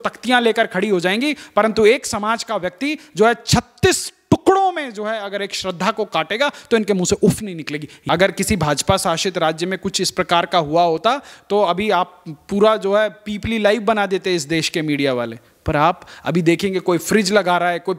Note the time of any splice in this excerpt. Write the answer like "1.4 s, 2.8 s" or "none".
7.9 s